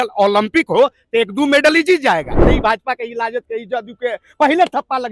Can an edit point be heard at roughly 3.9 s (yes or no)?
no